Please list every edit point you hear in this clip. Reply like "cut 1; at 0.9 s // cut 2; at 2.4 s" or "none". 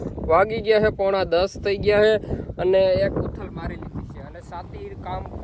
none